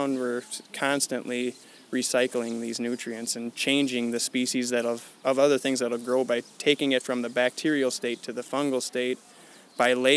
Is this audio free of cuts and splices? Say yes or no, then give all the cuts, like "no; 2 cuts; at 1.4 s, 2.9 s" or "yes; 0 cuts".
yes; 0 cuts